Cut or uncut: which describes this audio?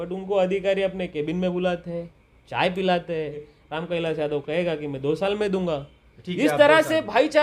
cut